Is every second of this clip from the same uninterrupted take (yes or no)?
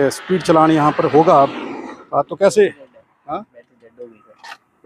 yes